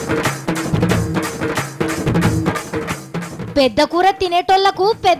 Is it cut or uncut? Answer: uncut